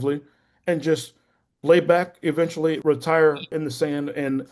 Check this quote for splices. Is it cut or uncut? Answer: cut